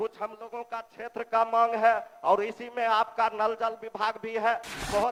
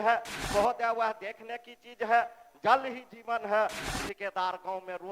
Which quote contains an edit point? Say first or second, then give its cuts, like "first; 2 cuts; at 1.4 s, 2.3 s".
second; 1 cut; at 3.8 s